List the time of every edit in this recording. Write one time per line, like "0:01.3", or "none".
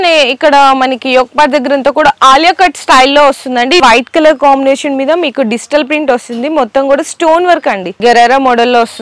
0:03.8
0:07.9